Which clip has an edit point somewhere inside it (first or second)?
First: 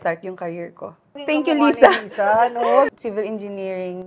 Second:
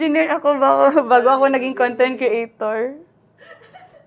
first